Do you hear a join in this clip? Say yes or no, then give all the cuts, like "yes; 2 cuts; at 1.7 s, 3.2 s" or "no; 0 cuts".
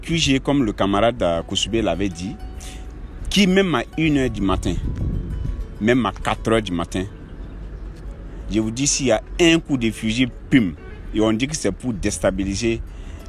no; 0 cuts